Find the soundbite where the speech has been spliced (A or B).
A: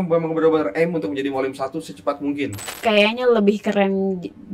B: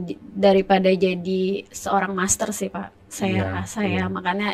A